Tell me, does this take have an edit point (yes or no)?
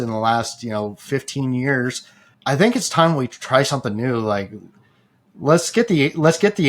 yes